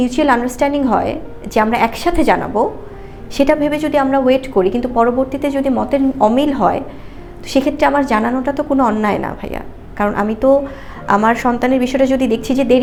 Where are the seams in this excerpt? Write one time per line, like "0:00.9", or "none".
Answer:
none